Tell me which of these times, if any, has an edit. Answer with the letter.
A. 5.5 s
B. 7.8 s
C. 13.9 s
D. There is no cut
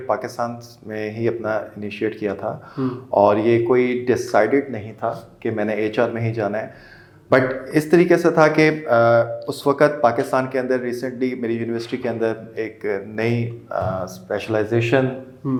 D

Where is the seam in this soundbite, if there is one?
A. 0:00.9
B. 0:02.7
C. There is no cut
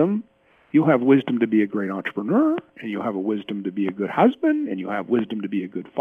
C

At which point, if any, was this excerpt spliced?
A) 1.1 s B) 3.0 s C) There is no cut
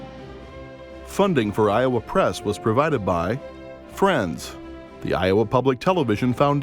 A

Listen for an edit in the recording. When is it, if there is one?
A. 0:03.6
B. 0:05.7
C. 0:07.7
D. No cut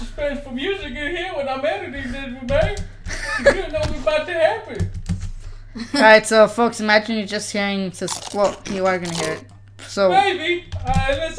A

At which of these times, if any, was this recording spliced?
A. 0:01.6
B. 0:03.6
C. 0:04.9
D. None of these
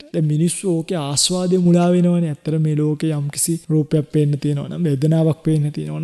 B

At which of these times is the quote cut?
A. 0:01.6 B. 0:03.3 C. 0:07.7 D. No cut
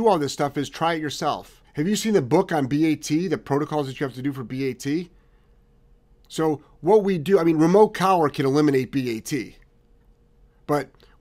A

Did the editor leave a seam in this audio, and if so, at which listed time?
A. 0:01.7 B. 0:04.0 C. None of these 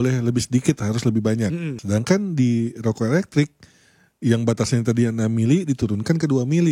A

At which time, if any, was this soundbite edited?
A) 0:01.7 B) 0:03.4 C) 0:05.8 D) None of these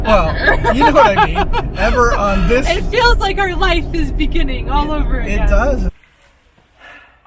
C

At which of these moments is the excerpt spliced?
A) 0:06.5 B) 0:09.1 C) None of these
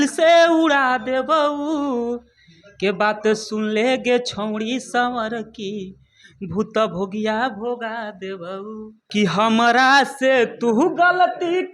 B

